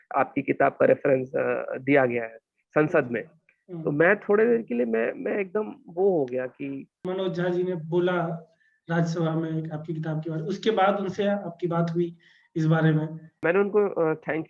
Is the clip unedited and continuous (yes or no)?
no